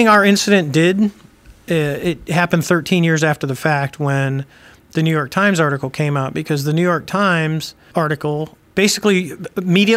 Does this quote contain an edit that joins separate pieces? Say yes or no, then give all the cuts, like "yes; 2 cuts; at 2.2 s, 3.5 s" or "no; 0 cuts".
yes; 2 cuts; at 7.8 s, 8.6 s